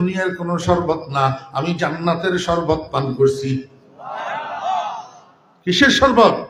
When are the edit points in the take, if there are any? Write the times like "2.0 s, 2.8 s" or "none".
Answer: none